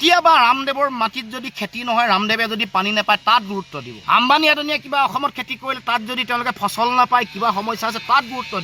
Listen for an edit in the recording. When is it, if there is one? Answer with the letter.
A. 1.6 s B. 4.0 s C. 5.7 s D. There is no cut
D